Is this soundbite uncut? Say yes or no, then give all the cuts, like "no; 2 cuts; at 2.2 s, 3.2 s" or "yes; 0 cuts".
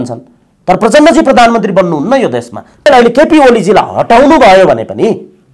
no; 1 cut; at 2.9 s